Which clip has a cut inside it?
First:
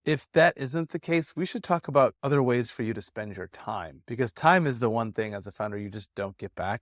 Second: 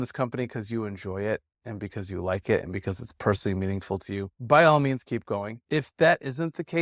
first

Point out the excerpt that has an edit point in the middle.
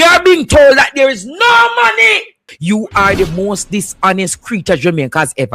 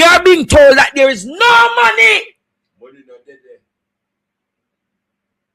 first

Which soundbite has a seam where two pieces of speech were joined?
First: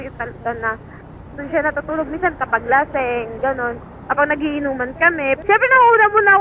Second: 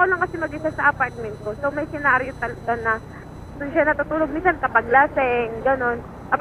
first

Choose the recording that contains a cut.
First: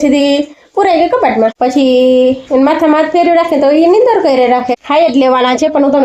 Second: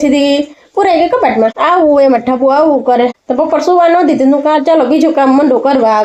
first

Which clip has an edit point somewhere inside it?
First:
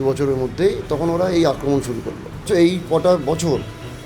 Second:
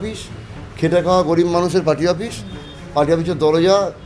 first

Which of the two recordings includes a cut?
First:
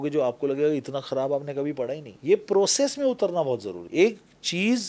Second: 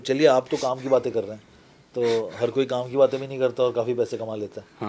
first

